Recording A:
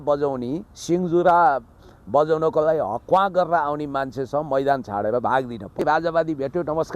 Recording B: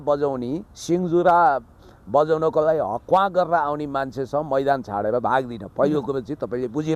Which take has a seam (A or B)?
A